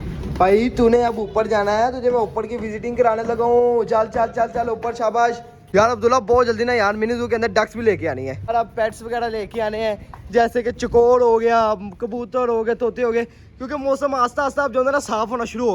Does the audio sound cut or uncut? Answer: cut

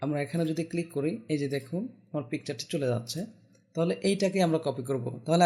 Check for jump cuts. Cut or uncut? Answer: uncut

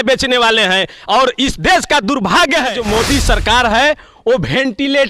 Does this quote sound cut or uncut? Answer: cut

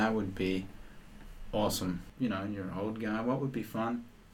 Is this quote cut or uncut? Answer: cut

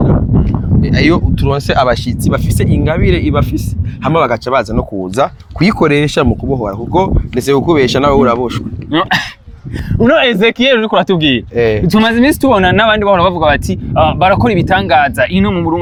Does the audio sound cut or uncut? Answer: uncut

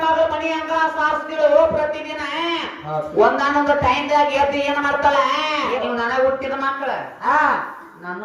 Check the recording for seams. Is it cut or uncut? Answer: cut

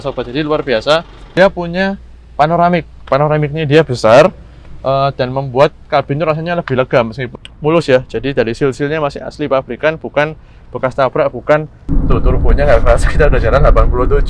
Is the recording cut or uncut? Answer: cut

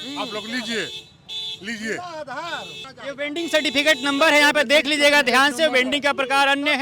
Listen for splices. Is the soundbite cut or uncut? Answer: cut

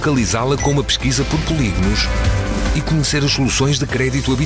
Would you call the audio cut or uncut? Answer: uncut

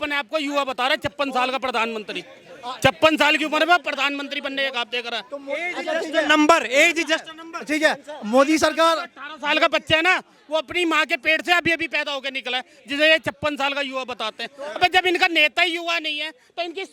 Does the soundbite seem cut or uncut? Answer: uncut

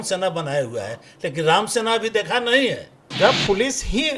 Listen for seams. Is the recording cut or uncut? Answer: cut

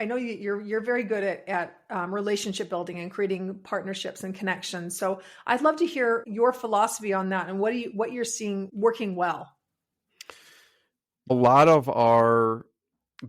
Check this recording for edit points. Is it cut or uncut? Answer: cut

